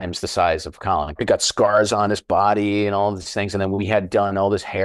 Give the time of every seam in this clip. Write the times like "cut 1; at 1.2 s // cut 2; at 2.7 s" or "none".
cut 1; at 1.2 s